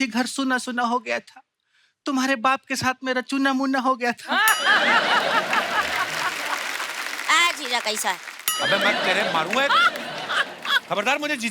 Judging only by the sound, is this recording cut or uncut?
uncut